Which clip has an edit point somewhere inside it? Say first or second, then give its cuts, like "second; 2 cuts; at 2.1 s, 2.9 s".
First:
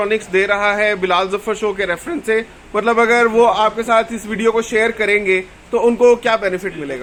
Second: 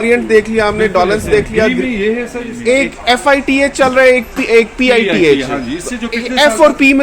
second; 1 cut; at 2.5 s